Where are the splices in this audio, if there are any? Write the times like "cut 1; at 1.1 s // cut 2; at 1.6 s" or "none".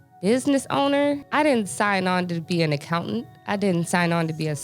cut 1; at 1.2 s